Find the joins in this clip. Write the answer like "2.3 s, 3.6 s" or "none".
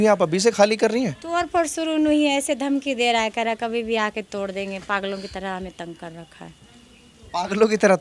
none